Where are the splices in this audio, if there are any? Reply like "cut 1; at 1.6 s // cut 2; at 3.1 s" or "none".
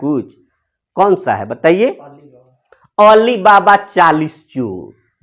none